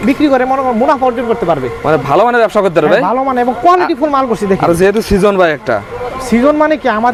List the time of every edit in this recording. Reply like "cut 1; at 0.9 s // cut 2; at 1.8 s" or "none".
none